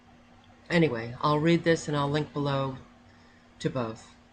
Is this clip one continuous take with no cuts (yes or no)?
no